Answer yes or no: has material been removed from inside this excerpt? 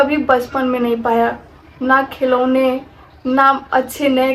no